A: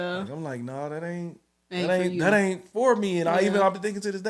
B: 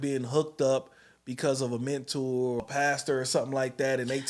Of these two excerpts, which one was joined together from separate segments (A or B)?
B